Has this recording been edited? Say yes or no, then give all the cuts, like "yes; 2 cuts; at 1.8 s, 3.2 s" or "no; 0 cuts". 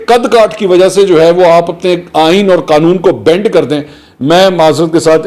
no; 0 cuts